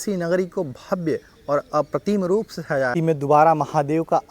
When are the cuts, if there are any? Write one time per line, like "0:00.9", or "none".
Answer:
0:02.9